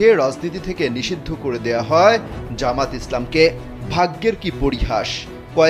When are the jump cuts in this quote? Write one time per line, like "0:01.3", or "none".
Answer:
none